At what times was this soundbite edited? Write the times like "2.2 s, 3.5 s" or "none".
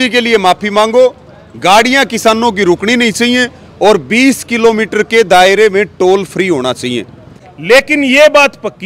7.4 s